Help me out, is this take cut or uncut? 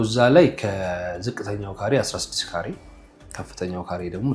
uncut